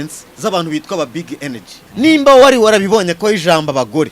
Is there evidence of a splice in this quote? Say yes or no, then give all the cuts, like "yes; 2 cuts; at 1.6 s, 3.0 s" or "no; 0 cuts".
yes; 1 cut; at 1.8 s